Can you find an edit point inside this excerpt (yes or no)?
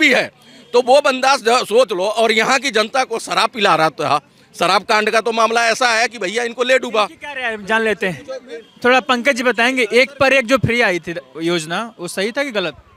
no